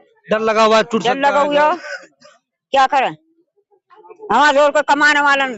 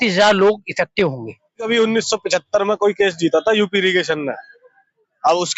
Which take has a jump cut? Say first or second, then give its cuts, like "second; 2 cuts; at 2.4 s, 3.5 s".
second; 1 cut; at 1.7 s